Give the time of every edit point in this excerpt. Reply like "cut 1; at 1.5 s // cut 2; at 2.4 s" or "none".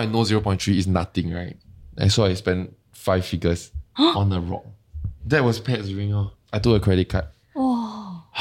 cut 1; at 3.8 s // cut 2; at 5.2 s